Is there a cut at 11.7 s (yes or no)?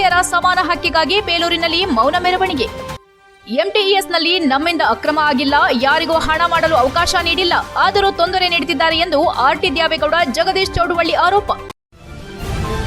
yes